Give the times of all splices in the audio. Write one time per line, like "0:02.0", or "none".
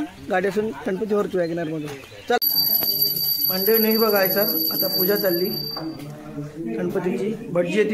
0:02.4